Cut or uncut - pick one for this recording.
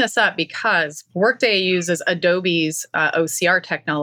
uncut